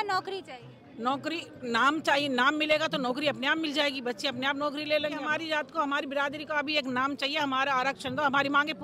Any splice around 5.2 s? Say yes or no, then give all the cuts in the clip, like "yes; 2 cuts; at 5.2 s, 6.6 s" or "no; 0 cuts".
yes; 1 cut; at 5.2 s